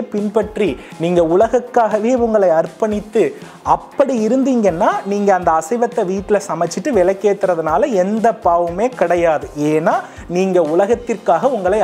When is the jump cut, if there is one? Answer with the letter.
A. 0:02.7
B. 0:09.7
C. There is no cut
C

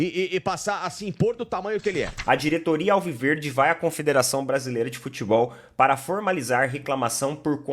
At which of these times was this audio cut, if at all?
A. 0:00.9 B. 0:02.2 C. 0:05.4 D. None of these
B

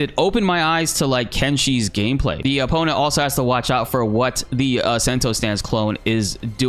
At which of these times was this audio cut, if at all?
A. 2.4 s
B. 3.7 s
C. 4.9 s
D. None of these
A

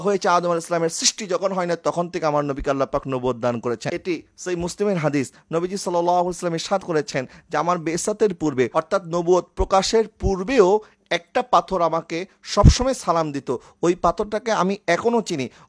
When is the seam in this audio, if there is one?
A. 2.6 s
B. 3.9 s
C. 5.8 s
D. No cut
B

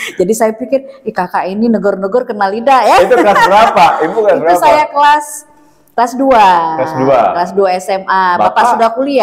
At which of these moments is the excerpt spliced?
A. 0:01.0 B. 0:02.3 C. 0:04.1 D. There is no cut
D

